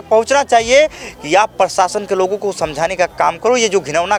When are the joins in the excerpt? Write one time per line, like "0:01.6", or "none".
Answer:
none

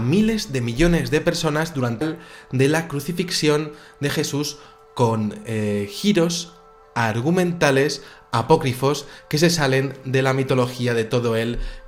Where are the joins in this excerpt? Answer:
none

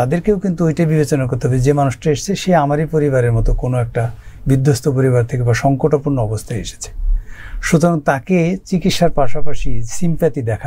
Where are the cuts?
none

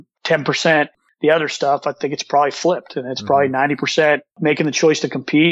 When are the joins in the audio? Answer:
0:04.3

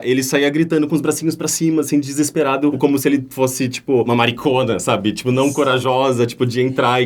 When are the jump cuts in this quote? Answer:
none

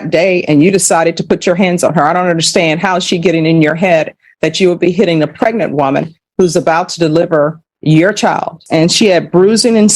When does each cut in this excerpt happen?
0:08.6

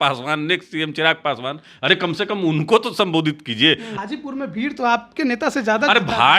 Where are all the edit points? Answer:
0:03.9

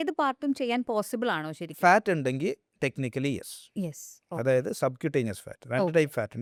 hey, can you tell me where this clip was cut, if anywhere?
none

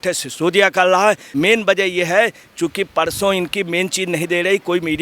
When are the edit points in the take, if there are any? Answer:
none

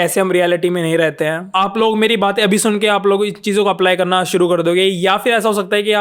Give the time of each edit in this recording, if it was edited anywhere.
0:01.4

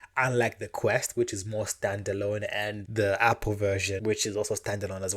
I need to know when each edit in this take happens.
0:02.8
0:04.0

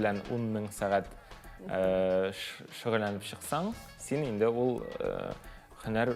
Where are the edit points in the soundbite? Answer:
none

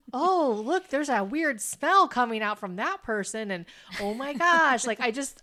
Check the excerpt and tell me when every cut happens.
none

